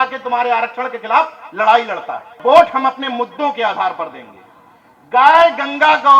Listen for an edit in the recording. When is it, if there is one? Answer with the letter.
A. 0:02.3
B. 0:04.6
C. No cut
A